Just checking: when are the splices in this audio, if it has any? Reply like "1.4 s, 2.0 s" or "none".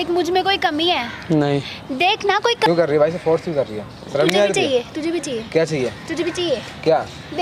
2.7 s